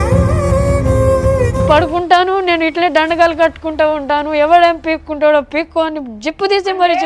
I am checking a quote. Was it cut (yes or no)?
yes